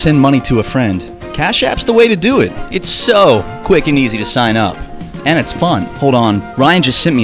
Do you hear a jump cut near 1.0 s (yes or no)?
no